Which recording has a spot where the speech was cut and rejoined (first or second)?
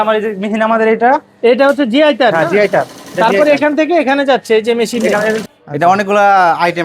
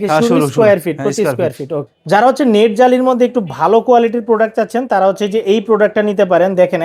first